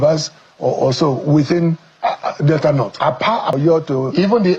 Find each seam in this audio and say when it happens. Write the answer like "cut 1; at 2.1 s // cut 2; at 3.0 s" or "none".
cut 1; at 3.6 s